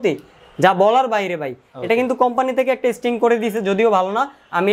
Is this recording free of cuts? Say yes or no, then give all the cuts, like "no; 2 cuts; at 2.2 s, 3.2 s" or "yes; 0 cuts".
yes; 0 cuts